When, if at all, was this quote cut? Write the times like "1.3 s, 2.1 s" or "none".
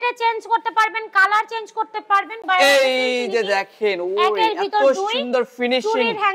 2.4 s